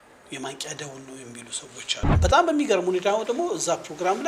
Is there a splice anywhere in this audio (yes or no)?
yes